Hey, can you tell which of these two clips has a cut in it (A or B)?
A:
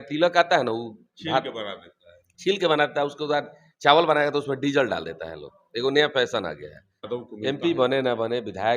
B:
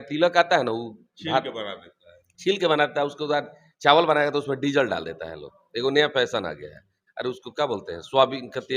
A